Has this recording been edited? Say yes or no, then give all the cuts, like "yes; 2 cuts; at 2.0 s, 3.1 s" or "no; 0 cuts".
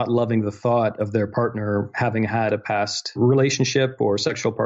yes; 1 cut; at 3.2 s